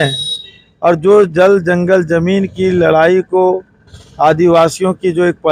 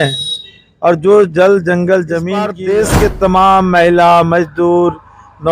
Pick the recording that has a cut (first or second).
second